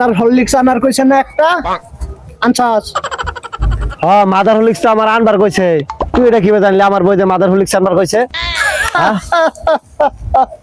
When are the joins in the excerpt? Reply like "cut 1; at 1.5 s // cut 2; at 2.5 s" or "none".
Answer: none